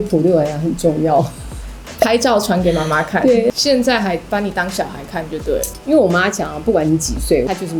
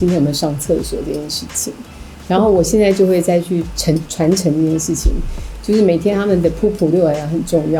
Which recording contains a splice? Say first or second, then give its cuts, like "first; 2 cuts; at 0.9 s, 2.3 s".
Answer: first; 1 cut; at 3.6 s